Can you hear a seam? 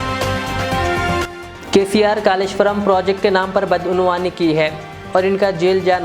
yes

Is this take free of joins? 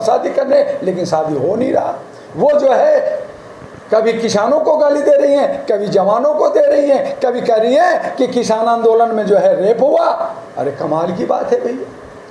yes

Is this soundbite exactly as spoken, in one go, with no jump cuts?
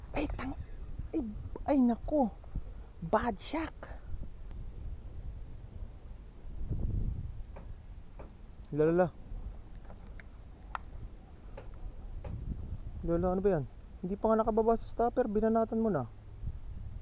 no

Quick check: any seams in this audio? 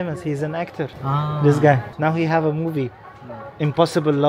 yes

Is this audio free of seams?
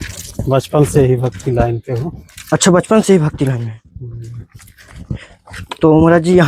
yes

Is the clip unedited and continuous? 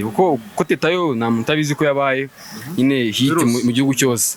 yes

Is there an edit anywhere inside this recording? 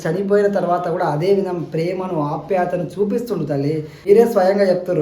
yes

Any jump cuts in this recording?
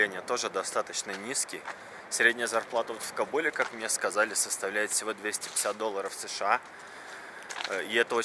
no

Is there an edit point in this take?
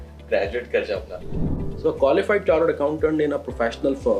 yes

